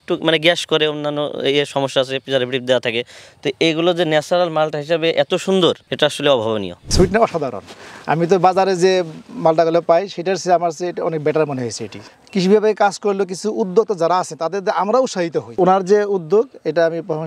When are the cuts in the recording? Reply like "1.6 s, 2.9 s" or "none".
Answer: 6.7 s, 15.5 s